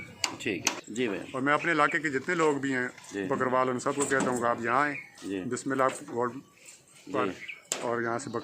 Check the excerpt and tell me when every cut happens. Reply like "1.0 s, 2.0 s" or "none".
none